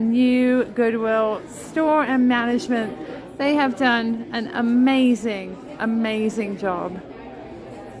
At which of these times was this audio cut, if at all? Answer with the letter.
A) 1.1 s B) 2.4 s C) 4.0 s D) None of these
D